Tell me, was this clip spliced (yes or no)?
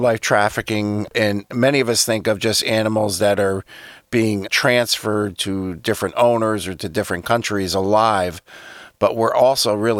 yes